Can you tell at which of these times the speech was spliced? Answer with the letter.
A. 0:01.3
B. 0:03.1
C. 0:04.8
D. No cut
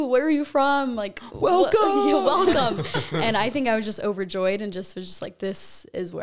D